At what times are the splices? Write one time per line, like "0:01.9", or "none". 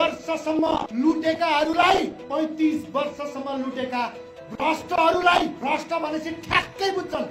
0:00.9
0:02.2
0:05.6

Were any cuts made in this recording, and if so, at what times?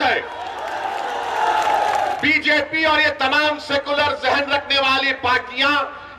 0:02.2

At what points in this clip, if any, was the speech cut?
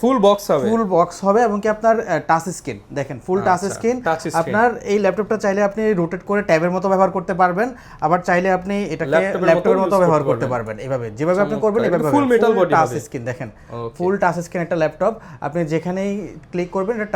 none

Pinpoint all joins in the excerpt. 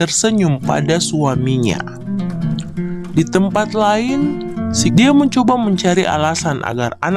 0:04.6

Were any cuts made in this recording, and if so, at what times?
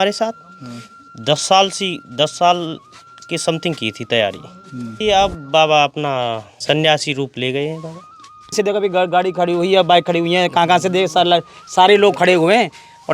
0:04.9
0:06.5
0:08.5

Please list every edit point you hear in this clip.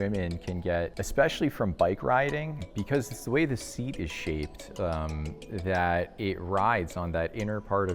0:01.0
0:02.6

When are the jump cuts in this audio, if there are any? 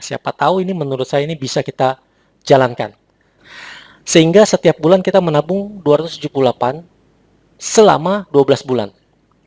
0:03.4

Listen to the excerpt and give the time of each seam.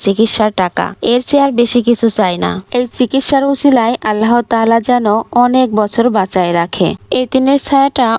none

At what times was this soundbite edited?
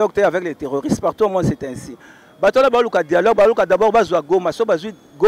none

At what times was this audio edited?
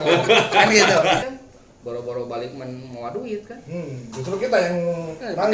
0:01.3

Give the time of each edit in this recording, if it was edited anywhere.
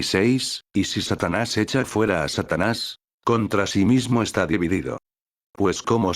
none

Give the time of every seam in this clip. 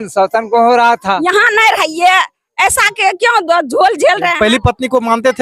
0:01.3
0:04.3

